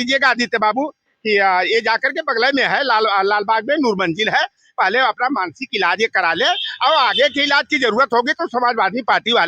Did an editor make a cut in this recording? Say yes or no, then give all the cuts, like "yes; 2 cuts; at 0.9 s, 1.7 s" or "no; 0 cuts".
no; 0 cuts